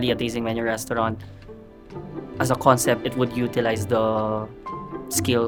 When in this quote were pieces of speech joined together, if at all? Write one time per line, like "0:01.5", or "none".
none